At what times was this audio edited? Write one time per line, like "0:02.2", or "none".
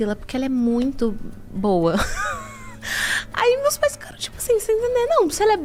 none